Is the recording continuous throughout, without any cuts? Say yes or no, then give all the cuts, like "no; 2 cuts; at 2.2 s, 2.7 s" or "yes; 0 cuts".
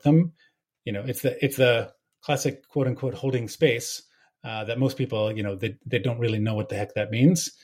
yes; 0 cuts